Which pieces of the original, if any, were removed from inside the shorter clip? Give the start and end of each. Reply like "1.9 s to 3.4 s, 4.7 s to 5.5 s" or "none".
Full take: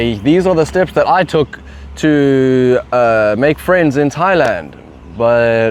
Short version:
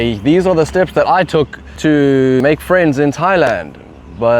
1.6 s to 1.8 s, 2.6 s to 3.4 s

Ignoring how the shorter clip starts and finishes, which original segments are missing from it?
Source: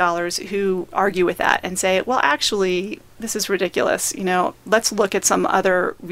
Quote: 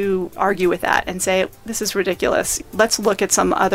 2.0 s to 3.0 s, 4.2 s to 4.5 s

